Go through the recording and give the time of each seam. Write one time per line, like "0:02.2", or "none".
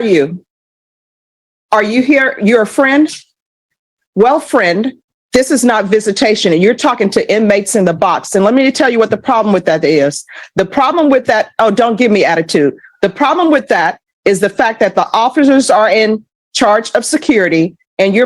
0:01.0

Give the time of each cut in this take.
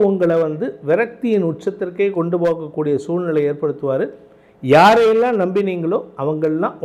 none

